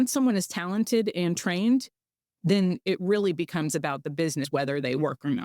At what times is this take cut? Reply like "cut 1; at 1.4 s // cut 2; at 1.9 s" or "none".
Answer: cut 1; at 4.5 s